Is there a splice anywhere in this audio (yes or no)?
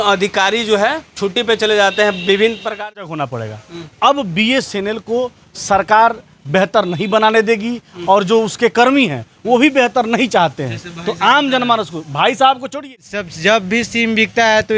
yes